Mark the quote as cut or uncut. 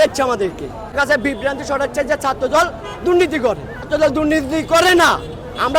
cut